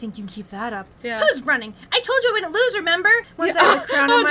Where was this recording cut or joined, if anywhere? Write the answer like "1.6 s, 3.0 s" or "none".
0.9 s, 3.3 s